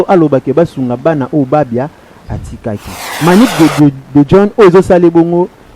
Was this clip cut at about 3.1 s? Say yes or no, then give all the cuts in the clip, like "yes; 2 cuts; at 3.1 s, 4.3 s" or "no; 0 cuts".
yes; 1 cut; at 3.1 s